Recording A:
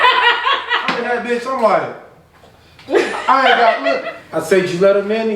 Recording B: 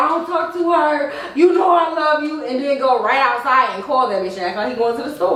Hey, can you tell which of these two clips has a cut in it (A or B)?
A